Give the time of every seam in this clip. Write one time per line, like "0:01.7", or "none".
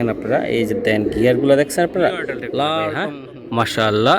0:02.9